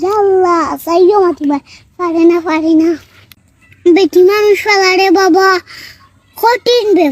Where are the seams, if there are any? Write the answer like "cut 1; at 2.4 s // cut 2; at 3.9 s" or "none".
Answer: cut 1; at 3.2 s